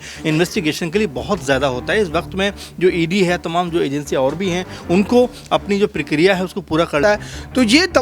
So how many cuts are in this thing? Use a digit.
1